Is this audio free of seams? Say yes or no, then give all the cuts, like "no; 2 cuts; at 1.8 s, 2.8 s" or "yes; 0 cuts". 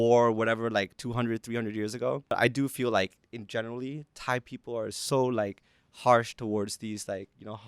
no; 1 cut; at 2.3 s